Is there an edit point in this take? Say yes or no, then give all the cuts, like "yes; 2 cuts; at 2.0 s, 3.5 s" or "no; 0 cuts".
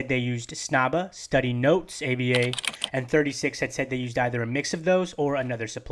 no; 0 cuts